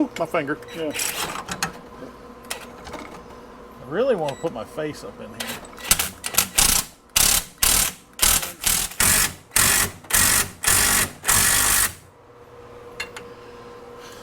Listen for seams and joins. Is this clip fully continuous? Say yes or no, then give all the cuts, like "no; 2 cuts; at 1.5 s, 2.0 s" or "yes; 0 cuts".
yes; 0 cuts